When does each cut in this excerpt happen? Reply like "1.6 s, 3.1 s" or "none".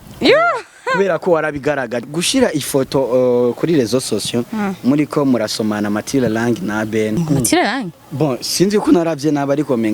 2.1 s, 7.2 s

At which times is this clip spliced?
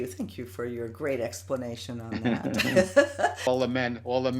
3.5 s

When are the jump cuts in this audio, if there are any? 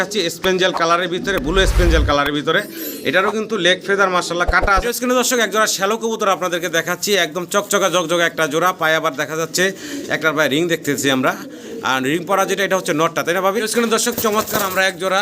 4.8 s, 13.6 s

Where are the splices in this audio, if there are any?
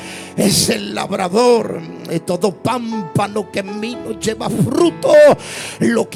none

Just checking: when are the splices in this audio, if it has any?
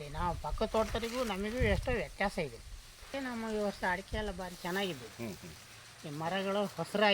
3.1 s

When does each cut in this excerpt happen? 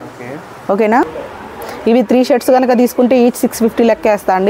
1.0 s

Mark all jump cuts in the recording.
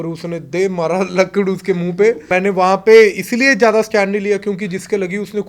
2.2 s

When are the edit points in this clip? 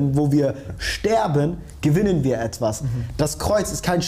none

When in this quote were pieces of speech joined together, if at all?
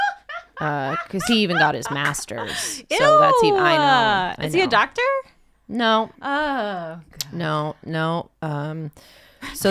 none

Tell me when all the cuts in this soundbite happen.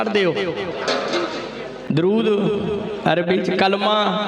none

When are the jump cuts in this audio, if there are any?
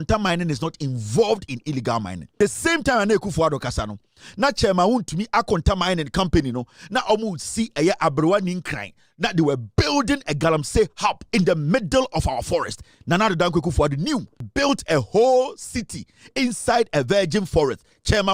2.2 s, 11.2 s, 14.5 s

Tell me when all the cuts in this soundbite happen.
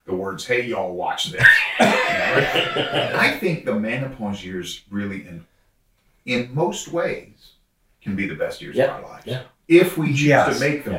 3.1 s

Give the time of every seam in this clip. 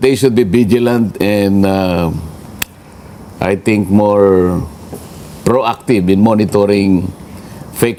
none

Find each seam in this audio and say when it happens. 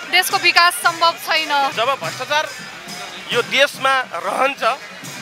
1.7 s

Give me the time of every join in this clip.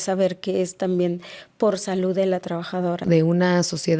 3.0 s

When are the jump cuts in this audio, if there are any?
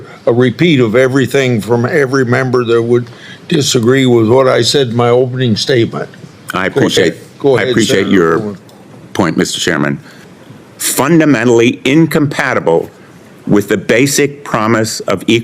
10.3 s

